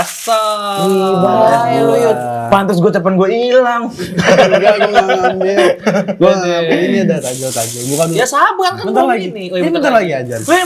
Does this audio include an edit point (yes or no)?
no